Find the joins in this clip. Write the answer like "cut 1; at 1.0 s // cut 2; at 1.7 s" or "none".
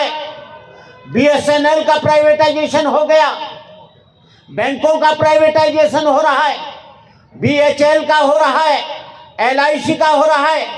none